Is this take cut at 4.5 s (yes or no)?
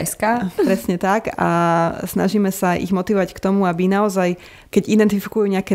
yes